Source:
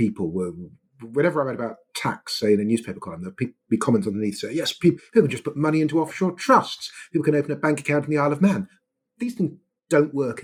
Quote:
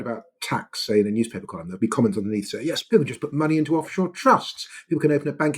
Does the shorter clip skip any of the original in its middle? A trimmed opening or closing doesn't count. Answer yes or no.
yes